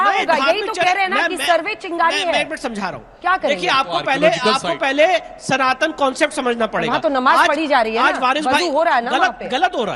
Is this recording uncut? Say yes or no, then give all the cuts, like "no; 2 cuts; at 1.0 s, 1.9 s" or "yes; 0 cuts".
yes; 0 cuts